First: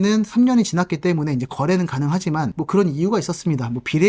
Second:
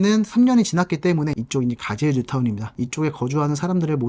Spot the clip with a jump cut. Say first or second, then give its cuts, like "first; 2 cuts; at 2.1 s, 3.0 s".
second; 2 cuts; at 1.3 s, 2.7 s